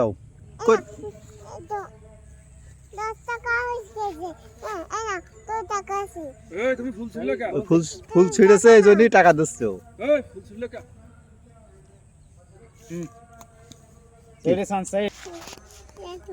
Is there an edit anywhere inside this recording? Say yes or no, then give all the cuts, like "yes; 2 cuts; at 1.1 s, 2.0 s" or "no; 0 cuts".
yes; 1 cut; at 15.1 s